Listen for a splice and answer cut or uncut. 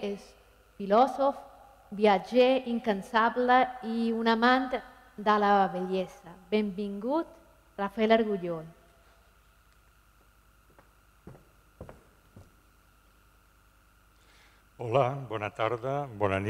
cut